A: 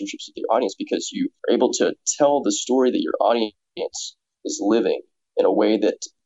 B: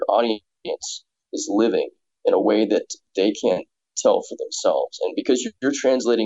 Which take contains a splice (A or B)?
B